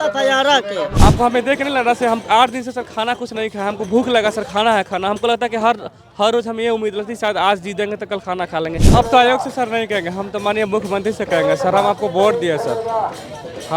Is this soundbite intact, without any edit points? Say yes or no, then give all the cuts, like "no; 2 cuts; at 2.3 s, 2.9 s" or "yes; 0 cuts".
no; 2 cuts; at 0.9 s, 8.8 s